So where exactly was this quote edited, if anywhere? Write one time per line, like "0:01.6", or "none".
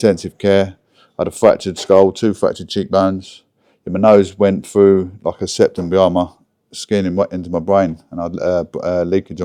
none